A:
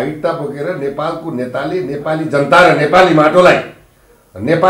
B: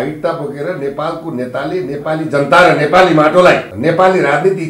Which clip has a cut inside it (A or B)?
B